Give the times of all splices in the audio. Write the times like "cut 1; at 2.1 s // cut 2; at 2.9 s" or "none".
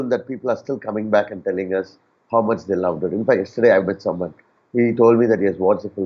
none